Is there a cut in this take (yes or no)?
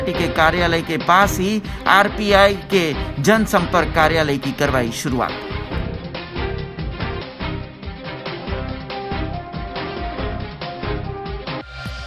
no